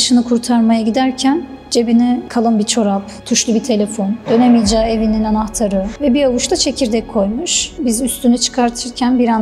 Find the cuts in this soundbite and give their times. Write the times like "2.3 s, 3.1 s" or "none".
2.3 s, 7.8 s